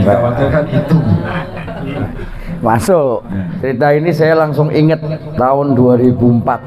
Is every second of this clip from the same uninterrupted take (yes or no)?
no